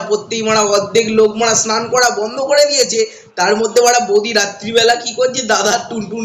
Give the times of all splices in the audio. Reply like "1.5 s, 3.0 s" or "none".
none